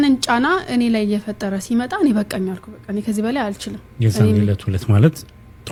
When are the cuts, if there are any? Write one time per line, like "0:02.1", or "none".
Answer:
none